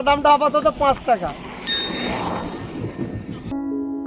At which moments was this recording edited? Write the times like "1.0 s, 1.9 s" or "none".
none

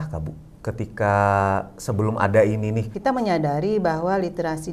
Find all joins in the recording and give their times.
2.9 s

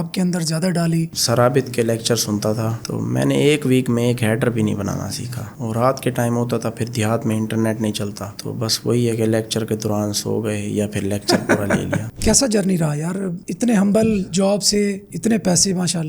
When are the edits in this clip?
1.1 s, 5.5 s, 12.1 s

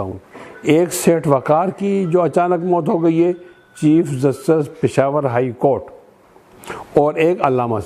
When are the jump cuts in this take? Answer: none

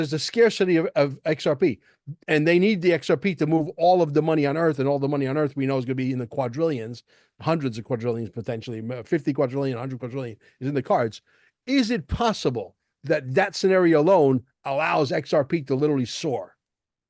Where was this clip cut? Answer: none

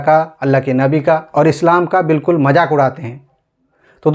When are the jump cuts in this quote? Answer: none

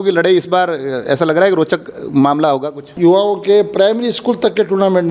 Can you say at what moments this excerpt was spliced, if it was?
2.9 s

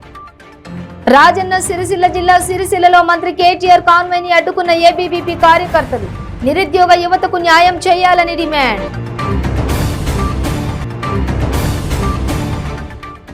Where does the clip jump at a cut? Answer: none

